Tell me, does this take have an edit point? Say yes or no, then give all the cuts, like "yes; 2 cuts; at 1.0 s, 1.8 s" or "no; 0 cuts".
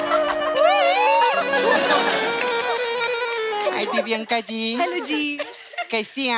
yes; 1 cut; at 3.6 s